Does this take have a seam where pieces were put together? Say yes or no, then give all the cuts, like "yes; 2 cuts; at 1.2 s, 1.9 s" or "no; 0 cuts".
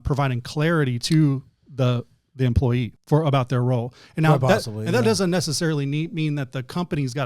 yes; 1 cut; at 3.0 s